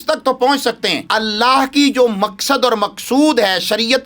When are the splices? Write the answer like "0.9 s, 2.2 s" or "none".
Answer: 0.9 s

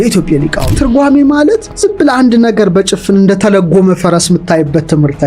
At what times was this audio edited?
0.8 s, 1.7 s

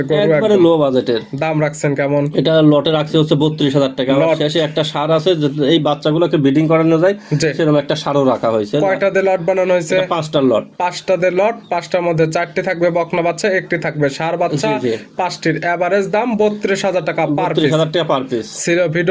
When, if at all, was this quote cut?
none

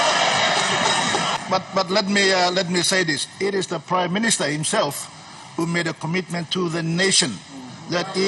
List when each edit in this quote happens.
1.4 s

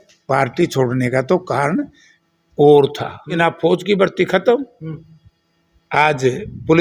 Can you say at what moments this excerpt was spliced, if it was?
3.4 s

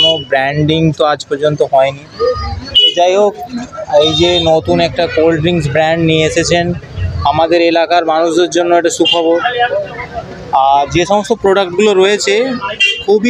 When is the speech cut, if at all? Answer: none

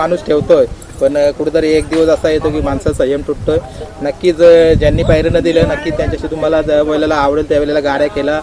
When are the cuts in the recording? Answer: none

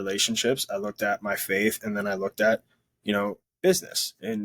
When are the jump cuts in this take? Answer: 3.4 s

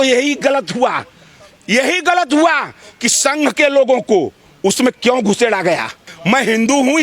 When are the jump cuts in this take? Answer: 6.1 s

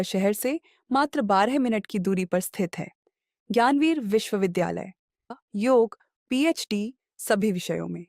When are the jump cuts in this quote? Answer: 5.3 s

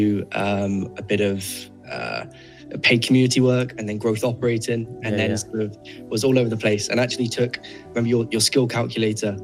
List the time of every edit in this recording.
none

